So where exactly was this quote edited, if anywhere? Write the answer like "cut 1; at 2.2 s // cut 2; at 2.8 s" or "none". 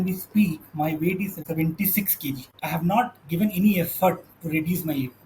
cut 1; at 1.4 s // cut 2; at 2.6 s